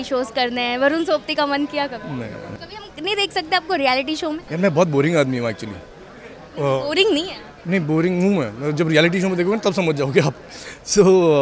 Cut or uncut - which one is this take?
cut